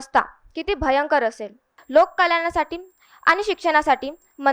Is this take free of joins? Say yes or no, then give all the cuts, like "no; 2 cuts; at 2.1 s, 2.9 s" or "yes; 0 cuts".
no; 1 cut; at 1.8 s